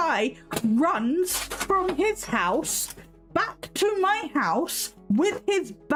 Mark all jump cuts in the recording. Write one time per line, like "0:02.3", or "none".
none

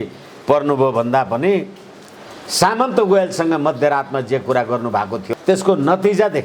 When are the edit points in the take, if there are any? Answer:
0:05.2

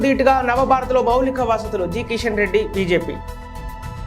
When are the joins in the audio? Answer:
none

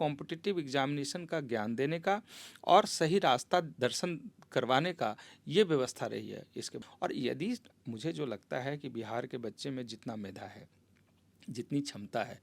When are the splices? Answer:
0:06.7

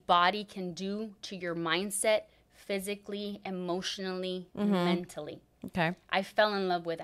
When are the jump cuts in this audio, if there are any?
none

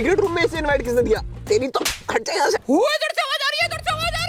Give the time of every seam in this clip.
none

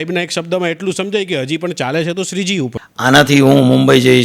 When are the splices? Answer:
0:02.8

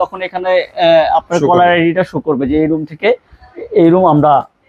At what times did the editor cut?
none

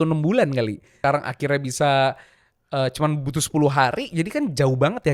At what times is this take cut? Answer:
0:00.9

